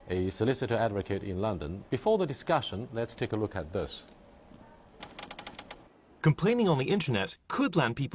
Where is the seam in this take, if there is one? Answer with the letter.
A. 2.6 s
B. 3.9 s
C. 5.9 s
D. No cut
D